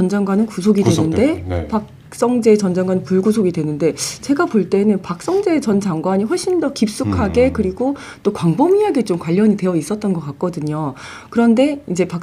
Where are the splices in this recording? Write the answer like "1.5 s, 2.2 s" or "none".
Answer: none